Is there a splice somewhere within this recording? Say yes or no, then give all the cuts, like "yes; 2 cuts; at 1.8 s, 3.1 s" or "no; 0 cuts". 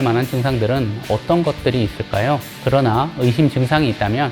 yes; 1 cut; at 2.5 s